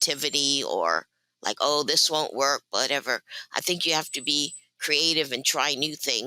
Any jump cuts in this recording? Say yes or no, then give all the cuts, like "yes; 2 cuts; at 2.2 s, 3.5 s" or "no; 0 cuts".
no; 0 cuts